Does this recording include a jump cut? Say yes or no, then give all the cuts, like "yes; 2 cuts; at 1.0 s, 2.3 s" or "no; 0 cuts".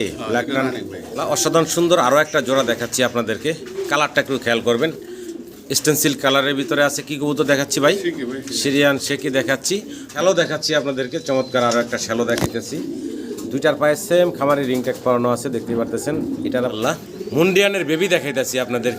yes; 3 cuts; at 1.0 s, 10.0 s, 16.7 s